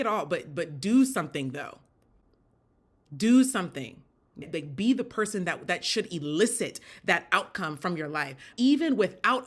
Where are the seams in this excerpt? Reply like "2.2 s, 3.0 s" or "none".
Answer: 4.4 s, 8.5 s

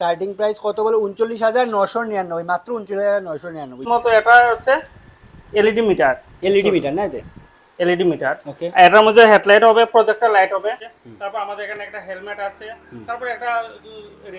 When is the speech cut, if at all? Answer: 3.9 s, 10.8 s

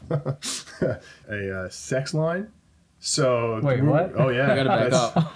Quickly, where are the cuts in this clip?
1.2 s

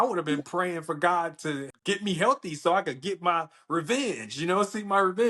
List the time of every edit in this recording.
1.7 s

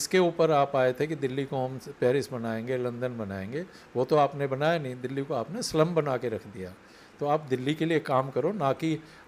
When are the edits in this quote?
none

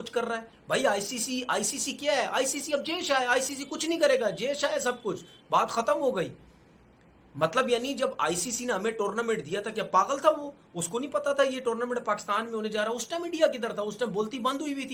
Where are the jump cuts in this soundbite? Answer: none

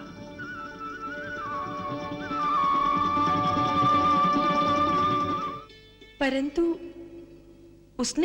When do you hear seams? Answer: 5.4 s

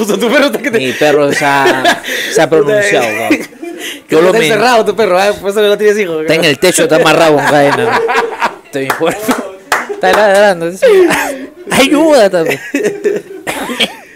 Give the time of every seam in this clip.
none

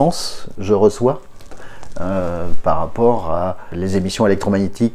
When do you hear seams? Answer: 3.7 s

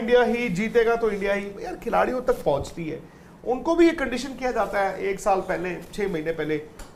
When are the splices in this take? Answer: none

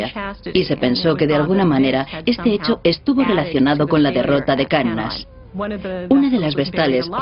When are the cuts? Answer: 4.4 s

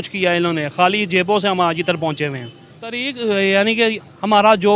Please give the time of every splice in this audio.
3.1 s

